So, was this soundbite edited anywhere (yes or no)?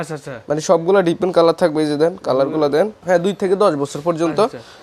yes